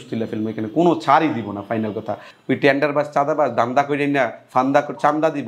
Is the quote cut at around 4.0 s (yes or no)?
no